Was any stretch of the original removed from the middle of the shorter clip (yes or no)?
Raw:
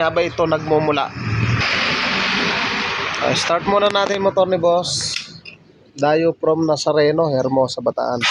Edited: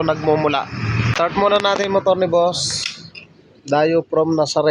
yes